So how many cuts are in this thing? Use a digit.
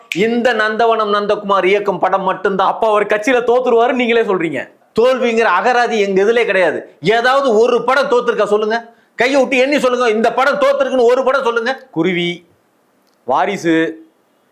0